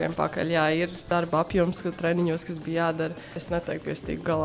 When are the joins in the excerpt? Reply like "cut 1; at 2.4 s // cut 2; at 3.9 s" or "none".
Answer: cut 1; at 1.1 s // cut 2; at 3.4 s